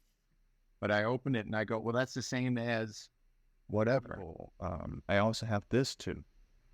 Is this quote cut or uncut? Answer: cut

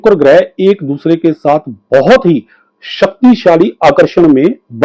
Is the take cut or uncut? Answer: uncut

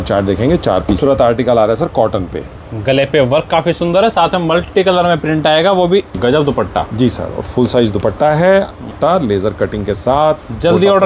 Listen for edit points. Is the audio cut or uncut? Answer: cut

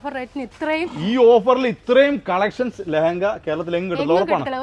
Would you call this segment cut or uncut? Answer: uncut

